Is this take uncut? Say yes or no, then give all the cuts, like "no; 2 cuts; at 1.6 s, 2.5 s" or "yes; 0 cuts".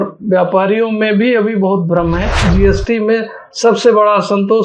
no; 1 cut; at 2.4 s